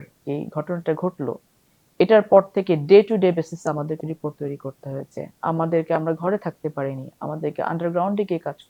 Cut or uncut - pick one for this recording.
uncut